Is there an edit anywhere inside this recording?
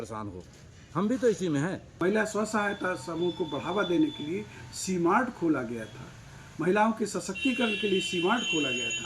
yes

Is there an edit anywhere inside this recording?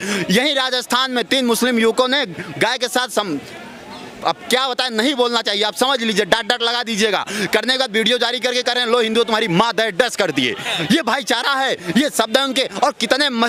no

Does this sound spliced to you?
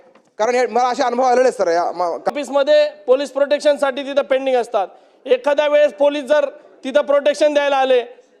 yes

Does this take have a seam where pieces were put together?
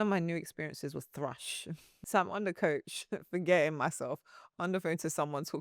yes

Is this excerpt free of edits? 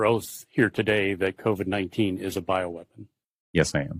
yes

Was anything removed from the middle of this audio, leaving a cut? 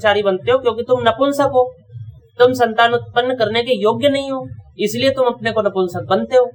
no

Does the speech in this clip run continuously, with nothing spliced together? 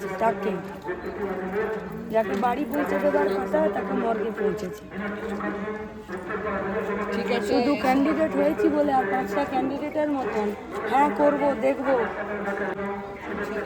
yes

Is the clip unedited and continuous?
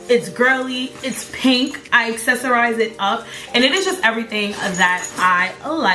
yes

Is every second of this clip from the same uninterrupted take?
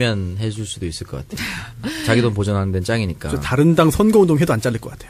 no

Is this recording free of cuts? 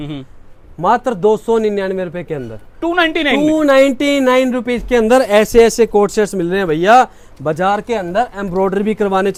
yes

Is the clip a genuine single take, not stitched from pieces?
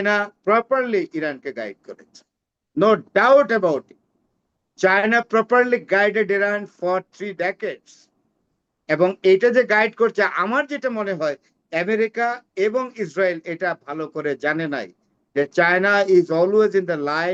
yes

